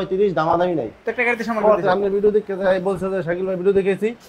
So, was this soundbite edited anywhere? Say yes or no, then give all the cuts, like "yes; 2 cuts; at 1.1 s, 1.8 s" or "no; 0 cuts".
yes; 1 cut; at 1.1 s